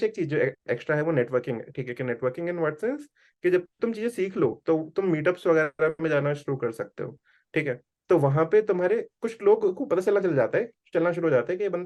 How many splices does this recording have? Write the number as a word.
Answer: zero